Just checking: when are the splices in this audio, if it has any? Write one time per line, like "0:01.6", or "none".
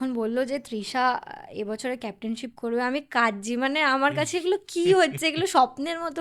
none